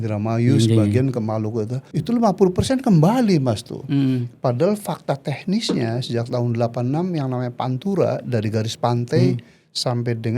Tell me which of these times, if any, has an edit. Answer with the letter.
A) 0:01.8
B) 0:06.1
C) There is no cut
A